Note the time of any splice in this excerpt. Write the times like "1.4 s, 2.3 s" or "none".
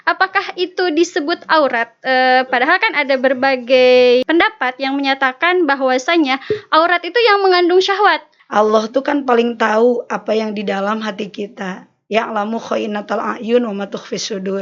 4.2 s, 8.3 s